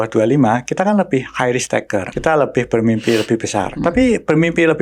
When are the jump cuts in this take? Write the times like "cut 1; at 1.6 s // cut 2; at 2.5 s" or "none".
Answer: cut 1; at 2.1 s // cut 2; at 3.7 s